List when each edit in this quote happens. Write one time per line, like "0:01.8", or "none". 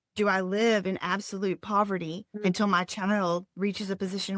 0:02.2
0:03.5